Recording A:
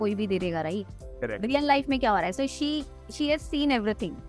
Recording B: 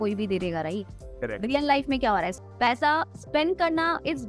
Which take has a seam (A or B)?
B